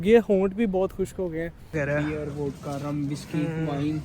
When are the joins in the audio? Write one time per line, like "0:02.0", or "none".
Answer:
0:01.7